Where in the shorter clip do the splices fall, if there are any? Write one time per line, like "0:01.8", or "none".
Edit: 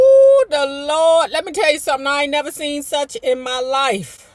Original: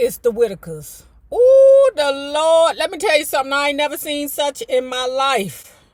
none